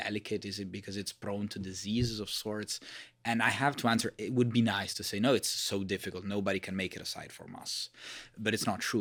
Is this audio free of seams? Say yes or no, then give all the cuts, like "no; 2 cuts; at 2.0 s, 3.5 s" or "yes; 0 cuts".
yes; 0 cuts